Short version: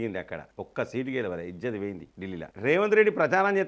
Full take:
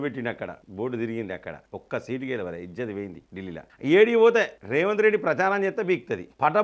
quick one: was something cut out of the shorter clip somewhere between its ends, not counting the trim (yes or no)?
yes